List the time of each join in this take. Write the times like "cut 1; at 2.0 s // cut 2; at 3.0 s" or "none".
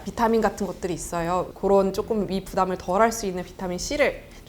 cut 1; at 1.5 s